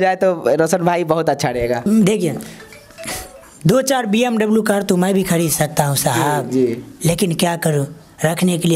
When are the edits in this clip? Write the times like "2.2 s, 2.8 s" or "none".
1.9 s